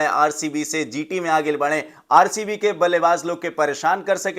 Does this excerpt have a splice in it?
no; 0 cuts

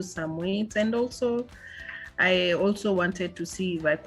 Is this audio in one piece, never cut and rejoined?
yes; 0 cuts

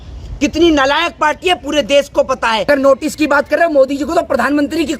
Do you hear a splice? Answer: yes; 1 cut; at 2.7 s

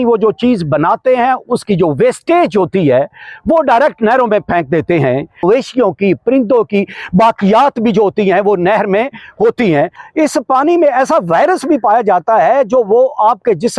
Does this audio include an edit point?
yes; 2 cuts; at 5.4 s, 10.0 s

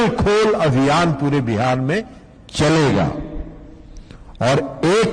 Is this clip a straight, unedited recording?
yes; 0 cuts

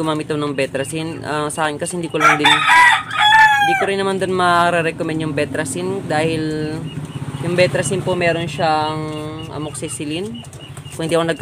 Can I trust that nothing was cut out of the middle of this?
yes; 0 cuts

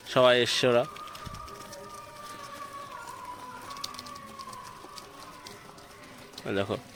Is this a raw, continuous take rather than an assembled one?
yes; 0 cuts

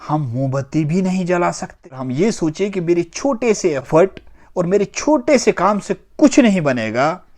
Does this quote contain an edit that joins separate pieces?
yes; 1 cut; at 2.0 s

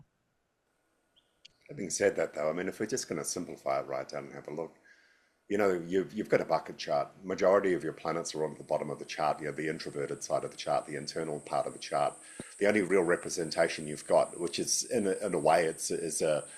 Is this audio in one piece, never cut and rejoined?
yes; 0 cuts

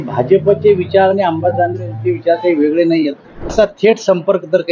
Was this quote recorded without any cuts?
no; 1 cut; at 3.5 s

